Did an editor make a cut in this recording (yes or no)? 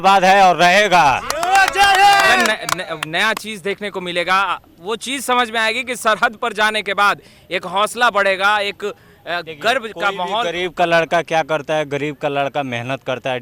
no